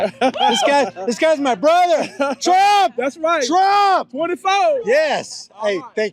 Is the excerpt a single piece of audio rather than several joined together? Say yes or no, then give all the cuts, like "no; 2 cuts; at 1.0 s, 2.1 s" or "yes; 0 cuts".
yes; 0 cuts